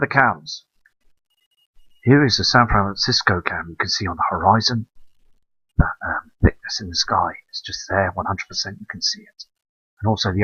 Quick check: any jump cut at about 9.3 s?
no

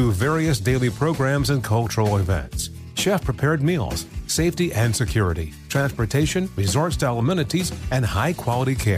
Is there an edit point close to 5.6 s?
no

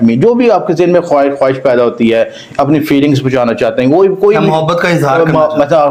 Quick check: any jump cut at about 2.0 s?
no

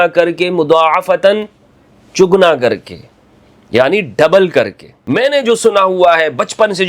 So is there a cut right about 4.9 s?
yes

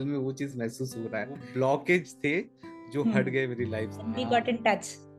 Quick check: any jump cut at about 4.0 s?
yes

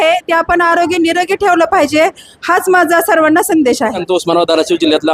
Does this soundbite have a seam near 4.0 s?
yes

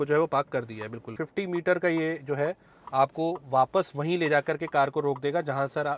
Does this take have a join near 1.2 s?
yes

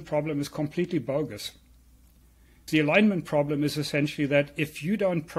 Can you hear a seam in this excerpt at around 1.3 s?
no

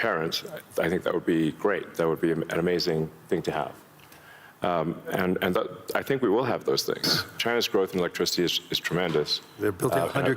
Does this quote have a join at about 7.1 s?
yes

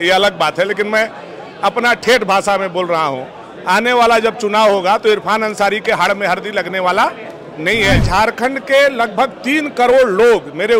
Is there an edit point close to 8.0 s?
yes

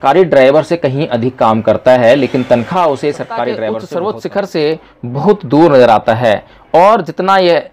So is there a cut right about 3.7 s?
yes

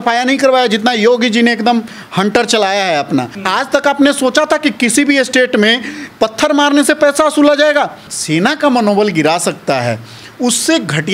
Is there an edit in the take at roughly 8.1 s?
yes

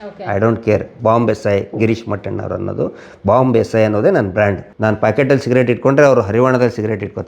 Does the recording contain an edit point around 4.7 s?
yes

